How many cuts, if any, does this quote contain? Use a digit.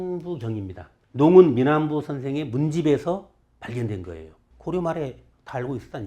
1